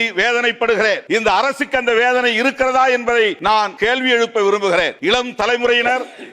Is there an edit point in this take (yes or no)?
yes